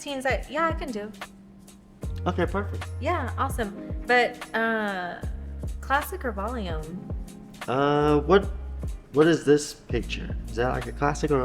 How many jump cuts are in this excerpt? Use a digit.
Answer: 1